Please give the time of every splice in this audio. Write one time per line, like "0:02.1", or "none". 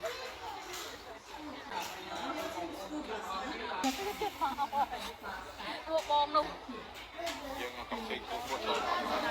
0:01.7
0:03.8
0:06.4